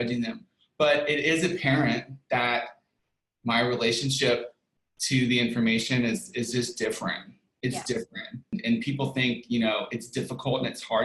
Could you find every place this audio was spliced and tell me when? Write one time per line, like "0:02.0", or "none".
0:08.5